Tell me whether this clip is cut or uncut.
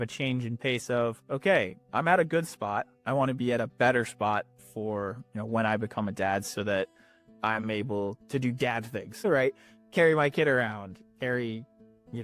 uncut